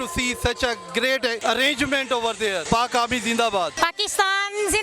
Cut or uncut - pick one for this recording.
cut